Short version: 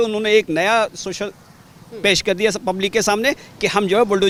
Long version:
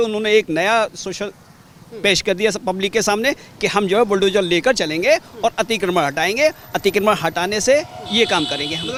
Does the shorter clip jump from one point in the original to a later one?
no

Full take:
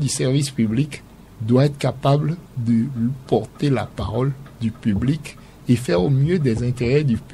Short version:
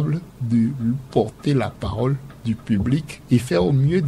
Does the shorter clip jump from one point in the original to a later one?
yes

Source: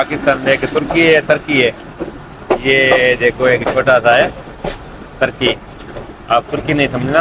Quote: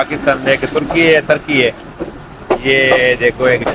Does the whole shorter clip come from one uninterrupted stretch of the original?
yes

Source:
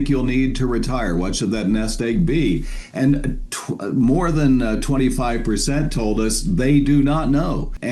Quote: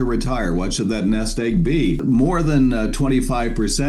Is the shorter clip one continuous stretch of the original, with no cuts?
no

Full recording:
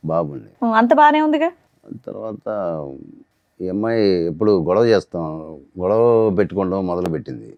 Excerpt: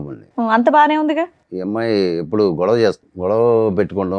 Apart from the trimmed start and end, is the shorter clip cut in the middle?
yes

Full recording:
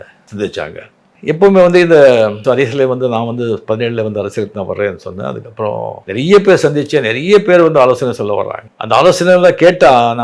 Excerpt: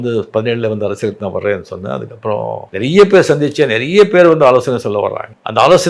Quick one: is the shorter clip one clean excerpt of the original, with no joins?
yes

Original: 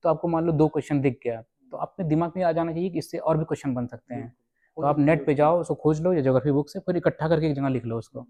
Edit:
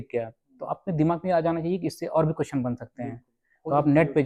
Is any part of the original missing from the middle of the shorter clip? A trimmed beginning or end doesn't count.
no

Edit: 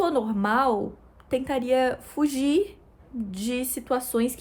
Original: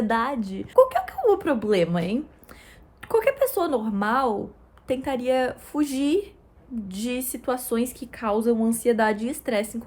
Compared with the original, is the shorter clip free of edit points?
yes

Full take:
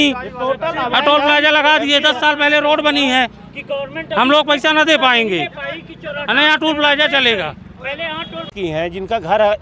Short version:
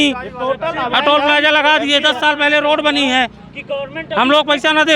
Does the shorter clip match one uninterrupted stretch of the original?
yes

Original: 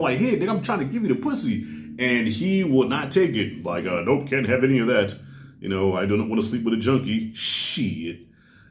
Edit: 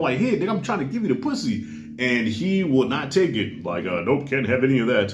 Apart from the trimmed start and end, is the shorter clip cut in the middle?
no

